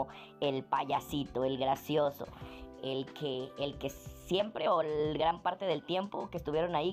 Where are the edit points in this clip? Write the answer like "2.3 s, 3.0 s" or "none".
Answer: none